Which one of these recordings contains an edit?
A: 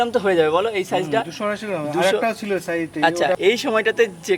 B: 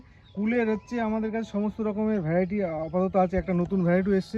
A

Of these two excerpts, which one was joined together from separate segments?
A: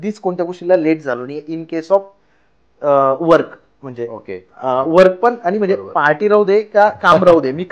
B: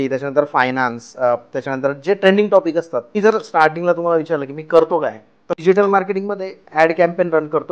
B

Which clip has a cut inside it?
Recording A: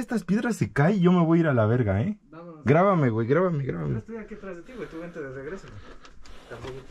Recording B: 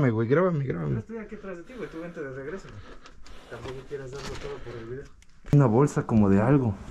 B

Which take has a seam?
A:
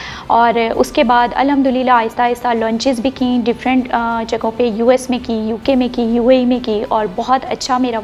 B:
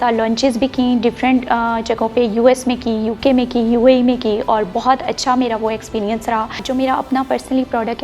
B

